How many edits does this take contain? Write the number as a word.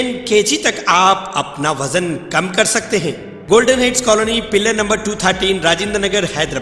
one